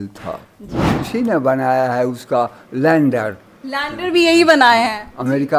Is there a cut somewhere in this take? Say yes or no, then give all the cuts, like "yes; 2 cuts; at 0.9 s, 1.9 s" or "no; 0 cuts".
yes; 1 cut; at 0.9 s